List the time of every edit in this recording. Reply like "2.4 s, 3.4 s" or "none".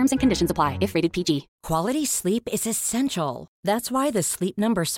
1.5 s